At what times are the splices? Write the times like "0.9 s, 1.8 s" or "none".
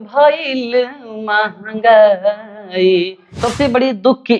3.4 s